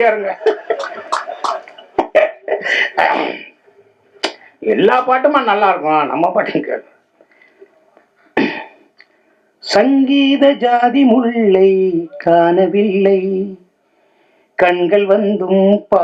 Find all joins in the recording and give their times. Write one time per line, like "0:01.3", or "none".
none